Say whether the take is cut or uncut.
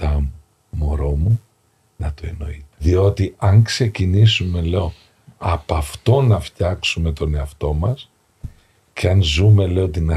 cut